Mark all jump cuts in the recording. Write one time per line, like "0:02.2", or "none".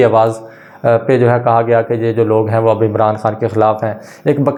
none